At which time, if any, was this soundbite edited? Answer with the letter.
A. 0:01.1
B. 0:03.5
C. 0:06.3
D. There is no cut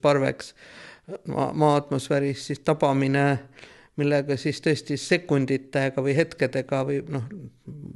D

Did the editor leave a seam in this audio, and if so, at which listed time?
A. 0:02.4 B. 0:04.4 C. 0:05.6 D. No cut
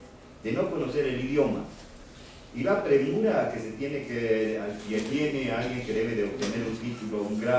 C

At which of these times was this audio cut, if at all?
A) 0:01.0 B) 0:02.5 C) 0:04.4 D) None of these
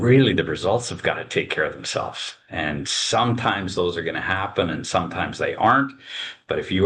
D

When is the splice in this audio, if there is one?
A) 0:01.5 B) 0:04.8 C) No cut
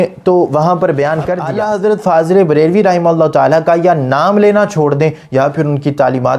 A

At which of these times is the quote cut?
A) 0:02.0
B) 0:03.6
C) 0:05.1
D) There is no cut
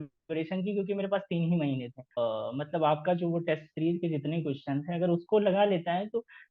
A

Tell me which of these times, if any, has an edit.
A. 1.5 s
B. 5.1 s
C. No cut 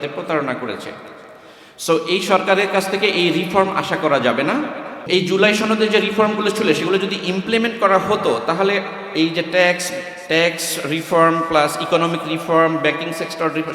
B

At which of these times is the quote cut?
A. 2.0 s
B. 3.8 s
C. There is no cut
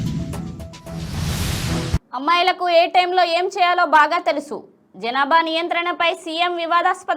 A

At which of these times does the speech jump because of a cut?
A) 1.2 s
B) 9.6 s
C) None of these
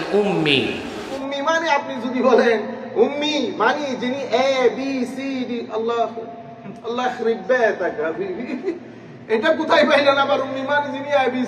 A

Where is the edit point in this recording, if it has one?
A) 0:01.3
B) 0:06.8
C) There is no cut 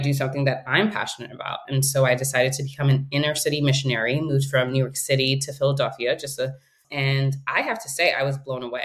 B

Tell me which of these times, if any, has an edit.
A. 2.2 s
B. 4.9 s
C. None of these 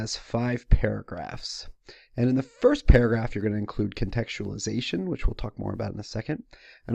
A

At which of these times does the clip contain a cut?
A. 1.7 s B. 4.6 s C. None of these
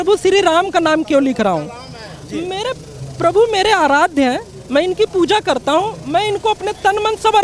C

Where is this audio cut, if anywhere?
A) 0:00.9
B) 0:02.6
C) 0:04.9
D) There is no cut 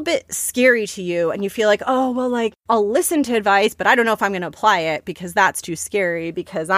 B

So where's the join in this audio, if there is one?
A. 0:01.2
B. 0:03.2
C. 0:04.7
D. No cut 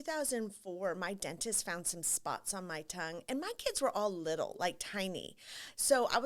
D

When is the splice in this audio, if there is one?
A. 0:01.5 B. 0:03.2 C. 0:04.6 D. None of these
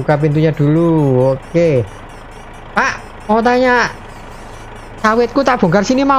D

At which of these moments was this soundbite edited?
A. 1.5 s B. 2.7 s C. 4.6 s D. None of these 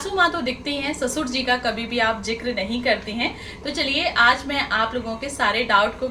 D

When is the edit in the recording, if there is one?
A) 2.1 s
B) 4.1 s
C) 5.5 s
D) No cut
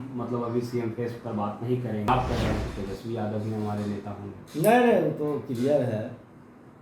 A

